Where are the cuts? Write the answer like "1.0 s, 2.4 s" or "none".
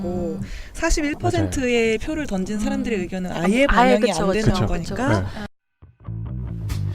5.4 s